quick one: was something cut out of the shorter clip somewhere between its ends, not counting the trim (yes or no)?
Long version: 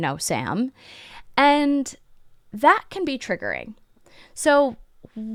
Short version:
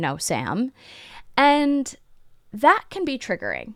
no